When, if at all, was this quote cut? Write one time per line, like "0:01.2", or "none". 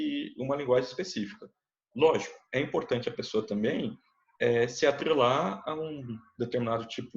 none